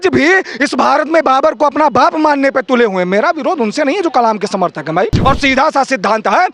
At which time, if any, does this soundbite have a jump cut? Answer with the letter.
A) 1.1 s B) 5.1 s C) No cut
B